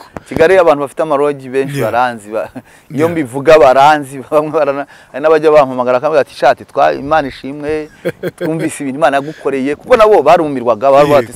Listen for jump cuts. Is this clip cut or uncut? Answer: uncut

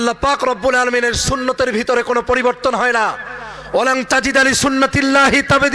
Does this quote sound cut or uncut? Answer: uncut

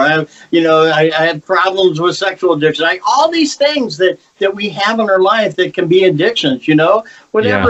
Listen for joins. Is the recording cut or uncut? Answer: uncut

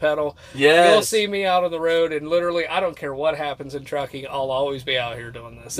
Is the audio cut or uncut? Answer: uncut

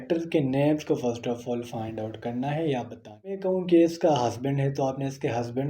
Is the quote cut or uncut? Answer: cut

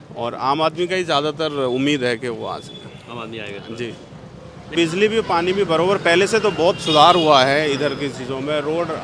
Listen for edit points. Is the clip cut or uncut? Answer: cut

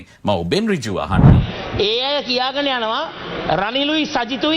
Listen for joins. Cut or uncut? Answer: cut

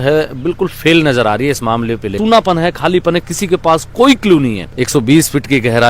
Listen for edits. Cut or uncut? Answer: cut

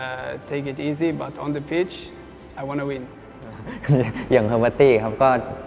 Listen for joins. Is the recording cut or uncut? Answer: cut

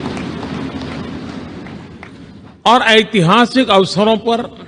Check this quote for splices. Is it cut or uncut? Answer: uncut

